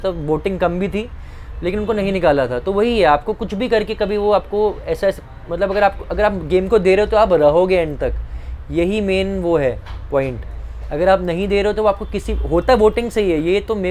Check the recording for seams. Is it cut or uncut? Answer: uncut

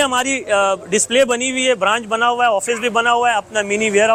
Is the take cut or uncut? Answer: uncut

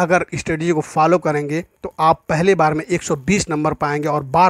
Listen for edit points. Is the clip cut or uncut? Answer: uncut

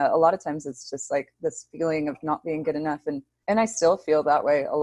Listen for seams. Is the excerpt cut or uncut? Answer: cut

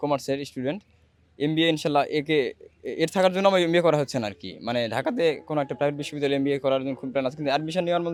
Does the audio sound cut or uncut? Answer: uncut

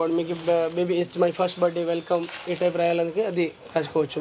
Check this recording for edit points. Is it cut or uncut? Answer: uncut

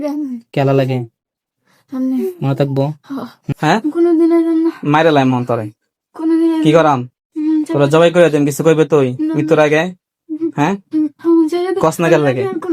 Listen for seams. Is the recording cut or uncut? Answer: cut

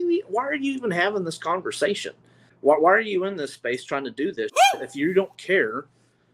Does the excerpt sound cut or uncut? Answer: cut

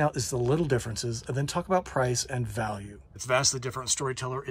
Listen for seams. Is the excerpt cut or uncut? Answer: uncut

